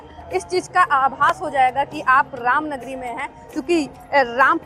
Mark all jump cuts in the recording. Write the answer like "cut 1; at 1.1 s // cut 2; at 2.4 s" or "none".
none